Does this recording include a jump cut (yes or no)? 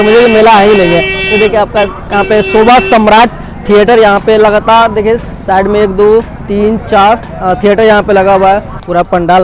no